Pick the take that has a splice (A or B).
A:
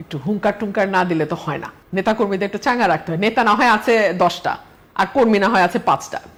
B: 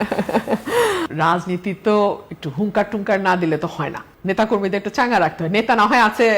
B